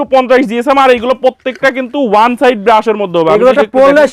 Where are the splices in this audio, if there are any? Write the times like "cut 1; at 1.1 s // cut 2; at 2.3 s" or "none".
none